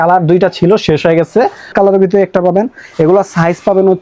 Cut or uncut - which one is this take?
cut